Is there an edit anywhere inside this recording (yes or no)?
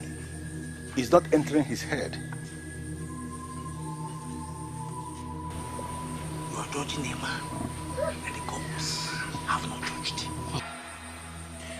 yes